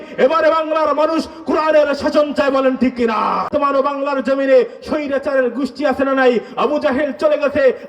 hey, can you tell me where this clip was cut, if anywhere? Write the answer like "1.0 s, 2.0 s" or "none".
3.5 s